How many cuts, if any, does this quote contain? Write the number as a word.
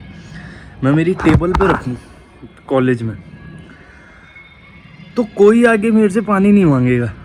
zero